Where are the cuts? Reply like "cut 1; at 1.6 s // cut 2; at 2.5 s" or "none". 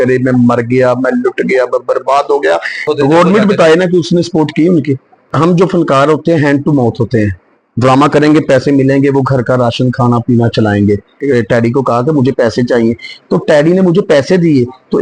cut 1; at 2.8 s // cut 2; at 5.2 s // cut 3; at 11.2 s